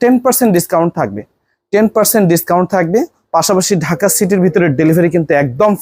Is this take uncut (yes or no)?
yes